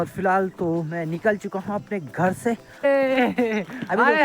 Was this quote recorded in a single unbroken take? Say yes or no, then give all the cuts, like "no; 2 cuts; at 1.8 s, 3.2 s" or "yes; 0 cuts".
no; 1 cut; at 2.7 s